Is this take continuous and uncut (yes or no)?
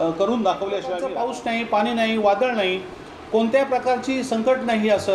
no